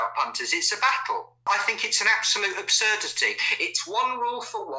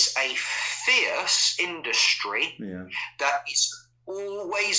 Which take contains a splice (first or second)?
first